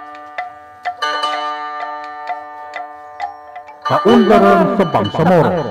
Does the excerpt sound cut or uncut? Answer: cut